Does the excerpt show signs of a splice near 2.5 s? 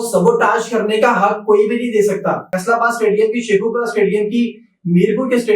yes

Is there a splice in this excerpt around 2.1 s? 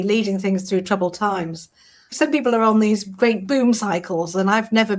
yes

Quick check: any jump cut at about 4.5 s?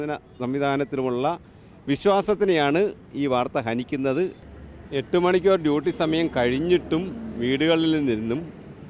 yes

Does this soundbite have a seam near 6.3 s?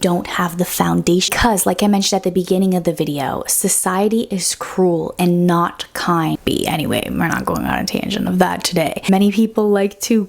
yes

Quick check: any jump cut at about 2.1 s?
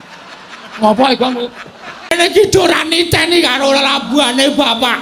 yes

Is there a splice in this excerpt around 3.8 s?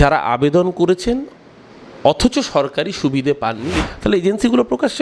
yes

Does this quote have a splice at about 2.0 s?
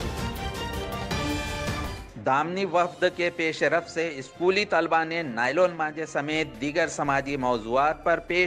yes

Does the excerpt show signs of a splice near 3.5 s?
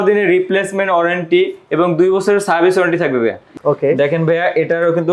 yes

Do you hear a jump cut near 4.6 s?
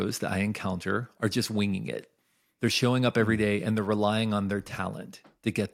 no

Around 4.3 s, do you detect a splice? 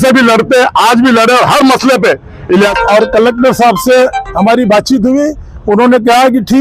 no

